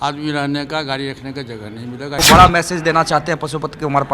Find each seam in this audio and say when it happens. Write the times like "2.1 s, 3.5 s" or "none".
2.2 s